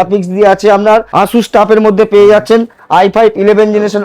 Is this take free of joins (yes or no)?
no